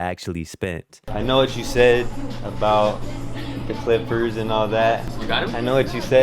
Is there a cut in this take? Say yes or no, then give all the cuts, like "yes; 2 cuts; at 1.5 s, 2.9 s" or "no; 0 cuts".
yes; 2 cuts; at 1.0 s, 5.2 s